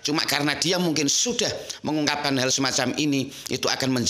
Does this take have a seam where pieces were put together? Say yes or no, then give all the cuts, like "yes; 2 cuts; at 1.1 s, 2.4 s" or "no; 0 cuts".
no; 0 cuts